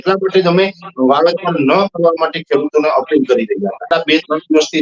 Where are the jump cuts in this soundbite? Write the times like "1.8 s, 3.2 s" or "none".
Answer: 3.8 s

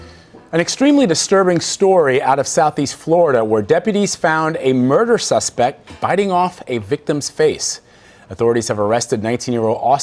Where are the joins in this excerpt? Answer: 8.7 s

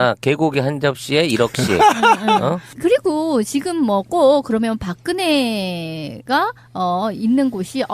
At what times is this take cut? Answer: none

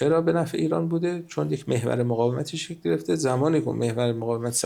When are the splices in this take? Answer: none

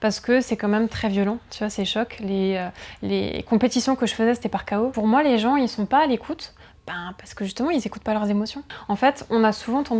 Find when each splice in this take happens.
4.9 s, 8.7 s

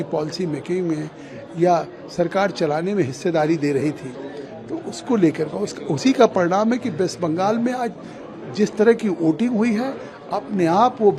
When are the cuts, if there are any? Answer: none

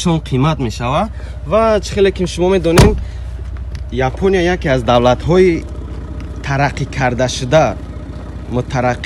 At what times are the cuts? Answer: none

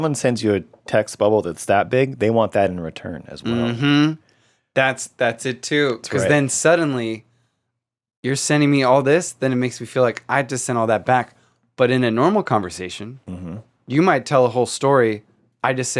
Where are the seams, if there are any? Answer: none

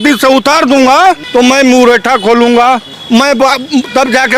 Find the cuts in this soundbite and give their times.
1.2 s, 2.9 s

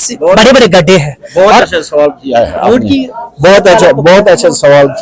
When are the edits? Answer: none

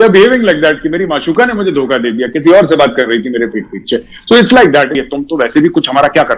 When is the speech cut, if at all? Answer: 5.0 s

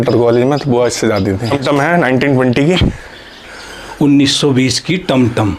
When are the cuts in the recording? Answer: 1.4 s

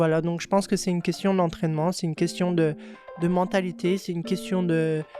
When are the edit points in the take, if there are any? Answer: none

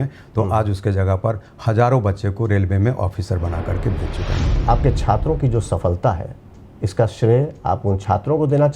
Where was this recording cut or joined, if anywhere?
4.5 s

